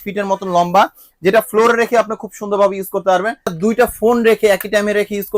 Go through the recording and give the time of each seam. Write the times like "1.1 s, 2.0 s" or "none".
3.6 s